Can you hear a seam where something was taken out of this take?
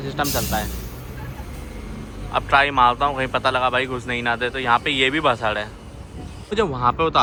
no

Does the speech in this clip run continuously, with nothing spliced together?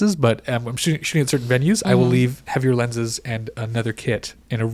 yes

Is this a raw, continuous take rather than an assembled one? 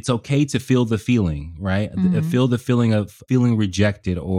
no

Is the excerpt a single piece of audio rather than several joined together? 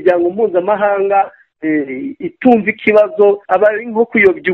no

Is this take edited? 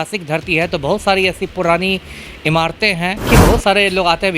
yes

